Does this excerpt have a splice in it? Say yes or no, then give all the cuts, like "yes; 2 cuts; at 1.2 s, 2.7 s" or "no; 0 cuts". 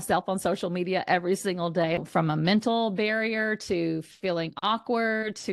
yes; 1 cut; at 2.0 s